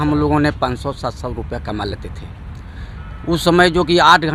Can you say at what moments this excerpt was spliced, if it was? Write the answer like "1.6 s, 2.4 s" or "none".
none

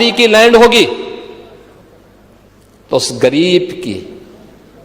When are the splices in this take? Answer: none

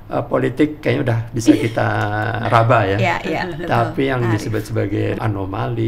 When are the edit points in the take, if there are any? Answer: 2.4 s, 5.2 s

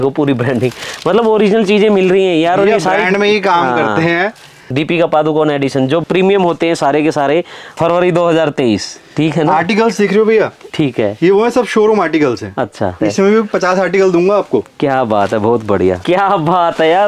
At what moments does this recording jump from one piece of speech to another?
4.6 s, 7.7 s, 13.0 s, 16.0 s

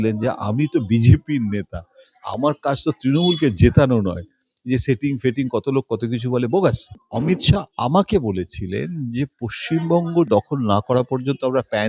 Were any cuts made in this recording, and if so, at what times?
7.0 s

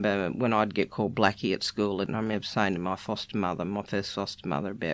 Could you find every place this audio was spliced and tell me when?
2.1 s

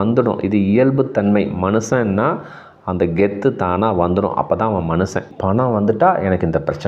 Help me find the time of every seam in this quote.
5.3 s

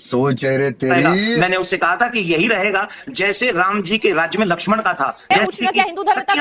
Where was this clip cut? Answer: 1.4 s, 5.3 s

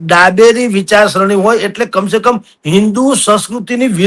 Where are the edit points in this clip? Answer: none

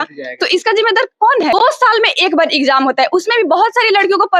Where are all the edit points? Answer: 1.5 s

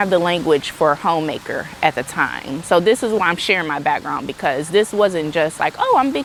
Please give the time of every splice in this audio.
none

